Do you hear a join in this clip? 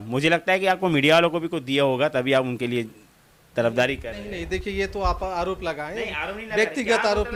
no; 0 cuts

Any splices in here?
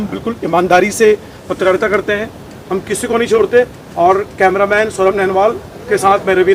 no; 0 cuts

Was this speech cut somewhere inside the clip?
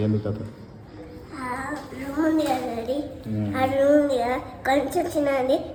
no; 0 cuts

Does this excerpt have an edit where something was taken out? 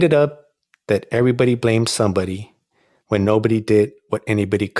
no; 0 cuts

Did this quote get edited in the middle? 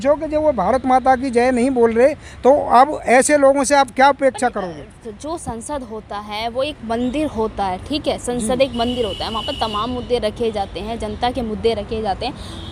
no; 0 cuts

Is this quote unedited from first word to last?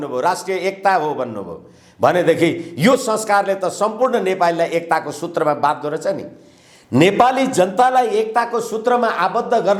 yes; 0 cuts

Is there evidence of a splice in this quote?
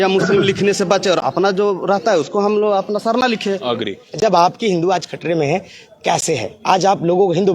yes; 1 cut; at 4.0 s

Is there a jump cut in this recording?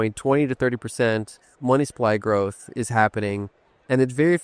no; 0 cuts

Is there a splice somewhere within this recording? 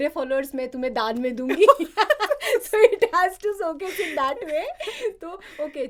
no; 0 cuts

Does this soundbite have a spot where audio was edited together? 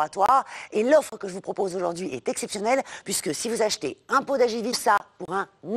yes; 1 cut; at 4.8 s

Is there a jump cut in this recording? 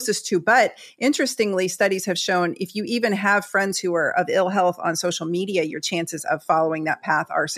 no; 0 cuts

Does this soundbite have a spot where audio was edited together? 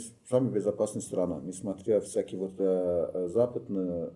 no; 0 cuts

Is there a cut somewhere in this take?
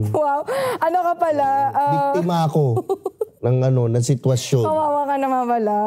no; 0 cuts

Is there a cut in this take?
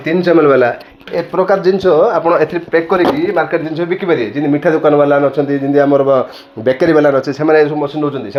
no; 0 cuts

